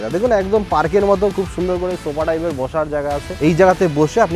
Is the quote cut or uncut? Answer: cut